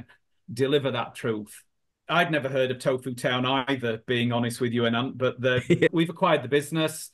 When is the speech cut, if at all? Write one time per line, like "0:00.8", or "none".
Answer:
0:02.0
0:05.9